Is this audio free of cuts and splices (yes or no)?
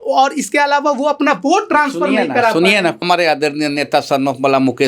no